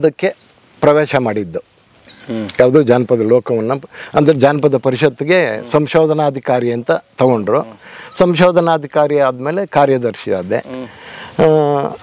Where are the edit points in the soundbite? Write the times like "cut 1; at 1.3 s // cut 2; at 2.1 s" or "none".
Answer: none